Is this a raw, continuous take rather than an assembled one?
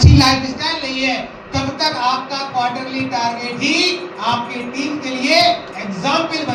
yes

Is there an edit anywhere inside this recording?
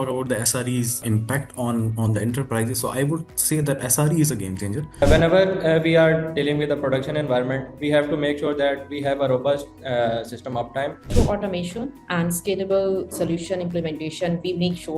yes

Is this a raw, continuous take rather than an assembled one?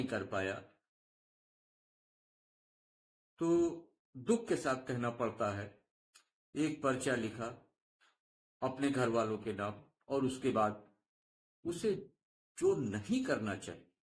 yes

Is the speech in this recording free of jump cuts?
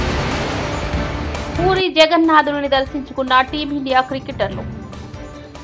yes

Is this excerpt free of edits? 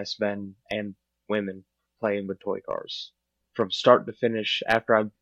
no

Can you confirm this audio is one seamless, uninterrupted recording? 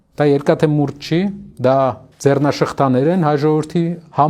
no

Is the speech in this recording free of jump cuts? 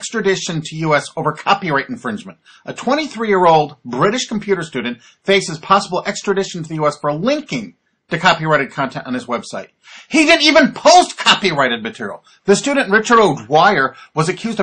no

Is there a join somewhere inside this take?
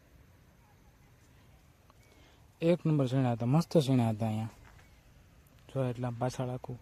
no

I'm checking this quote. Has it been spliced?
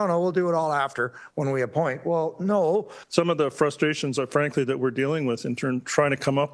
yes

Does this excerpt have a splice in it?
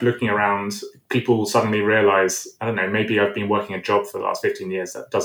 no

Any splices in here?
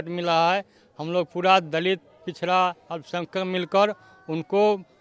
no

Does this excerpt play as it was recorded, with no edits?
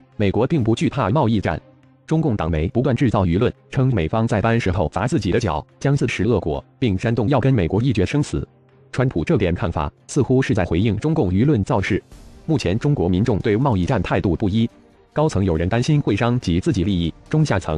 yes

